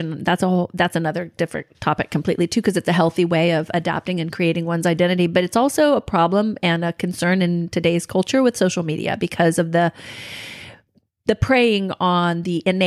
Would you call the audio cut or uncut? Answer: uncut